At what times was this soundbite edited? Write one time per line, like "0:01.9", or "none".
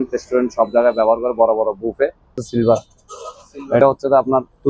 0:02.4
0:03.8